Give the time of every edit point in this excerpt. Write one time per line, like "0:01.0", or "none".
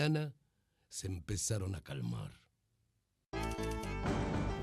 none